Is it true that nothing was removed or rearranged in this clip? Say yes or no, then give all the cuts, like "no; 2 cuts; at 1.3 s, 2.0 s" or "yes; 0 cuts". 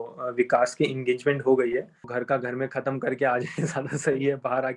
no; 1 cut; at 2.1 s